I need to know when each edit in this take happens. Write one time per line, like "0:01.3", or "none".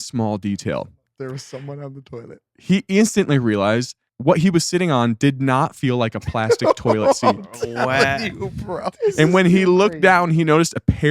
0:01.0
0:04.0
0:09.0